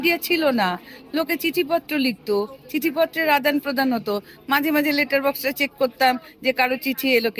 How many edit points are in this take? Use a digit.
0